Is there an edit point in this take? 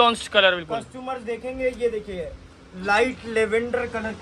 no; 0 cuts

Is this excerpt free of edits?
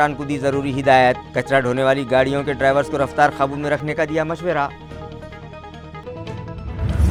yes; 0 cuts

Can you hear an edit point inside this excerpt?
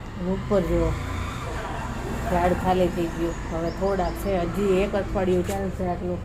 no; 0 cuts

